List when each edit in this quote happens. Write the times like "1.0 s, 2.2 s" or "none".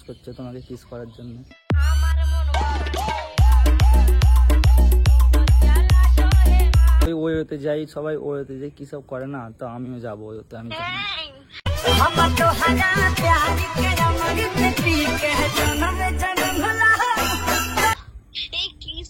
7.1 s, 17.9 s